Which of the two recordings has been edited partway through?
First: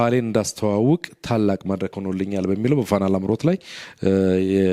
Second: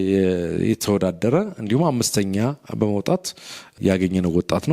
second; 1 cut; at 3.7 s

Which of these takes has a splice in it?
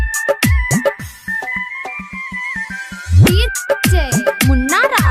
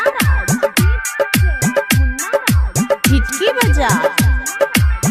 first; 1 cut; at 0.9 s

